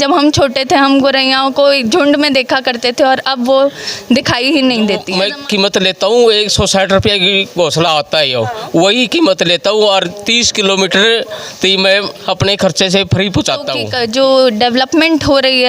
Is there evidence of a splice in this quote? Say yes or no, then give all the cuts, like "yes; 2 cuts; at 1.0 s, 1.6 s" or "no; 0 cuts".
yes; 2 cuts; at 5.1 s, 13.8 s